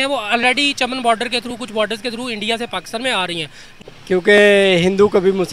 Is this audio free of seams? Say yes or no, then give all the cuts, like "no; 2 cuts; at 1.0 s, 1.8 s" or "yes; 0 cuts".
no; 1 cut; at 3.7 s